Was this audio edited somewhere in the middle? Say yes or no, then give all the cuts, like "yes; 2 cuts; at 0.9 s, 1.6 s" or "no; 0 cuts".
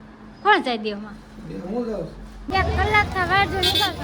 yes; 1 cut; at 2.5 s